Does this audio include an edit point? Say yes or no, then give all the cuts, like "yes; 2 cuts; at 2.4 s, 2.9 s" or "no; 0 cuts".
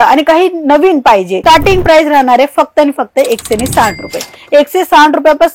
yes; 1 cut; at 1.3 s